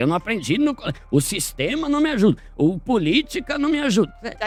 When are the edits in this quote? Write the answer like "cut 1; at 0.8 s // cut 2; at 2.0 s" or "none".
none